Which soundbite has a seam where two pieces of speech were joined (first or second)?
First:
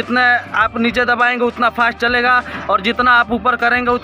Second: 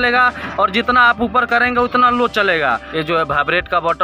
second